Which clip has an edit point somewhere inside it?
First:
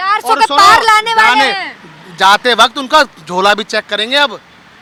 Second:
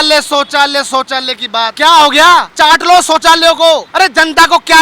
second; 3 cuts; at 1.7 s, 2.5 s, 3.9 s

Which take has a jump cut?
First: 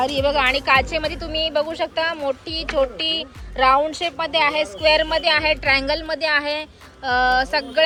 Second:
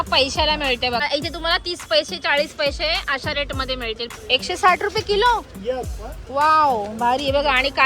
second; 2 cuts; at 1.0 s, 4.1 s

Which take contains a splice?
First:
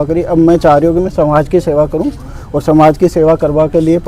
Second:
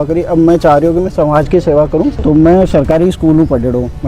second; 1 cut; at 2.2 s

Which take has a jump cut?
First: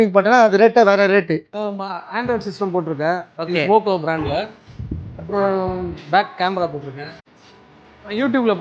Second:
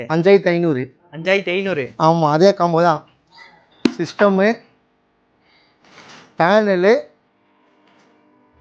first; 2 cuts; at 1.5 s, 7.3 s

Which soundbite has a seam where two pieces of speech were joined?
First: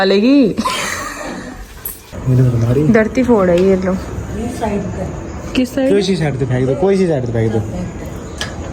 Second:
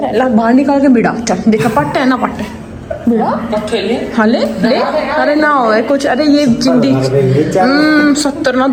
first; 1 cut; at 2.1 s

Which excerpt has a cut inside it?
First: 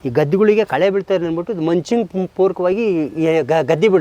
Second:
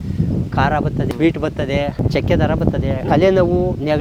second; 3 cuts; at 1.1 s, 2.0 s, 3.1 s

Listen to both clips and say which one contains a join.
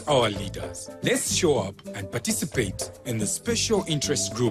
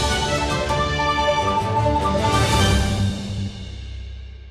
second; 1 cut; at 1.0 s

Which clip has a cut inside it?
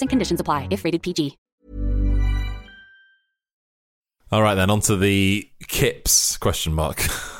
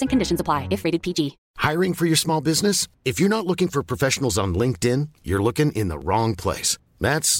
second; 1 cut; at 1.5 s

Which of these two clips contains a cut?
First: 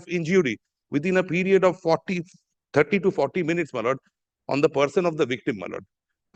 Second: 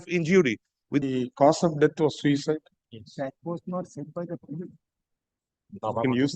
second; 1 cut; at 1.0 s

